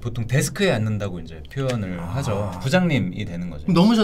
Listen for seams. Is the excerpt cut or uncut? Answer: cut